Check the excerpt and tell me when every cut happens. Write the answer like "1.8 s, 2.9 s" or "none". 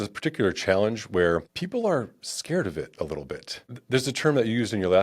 1.6 s, 3.7 s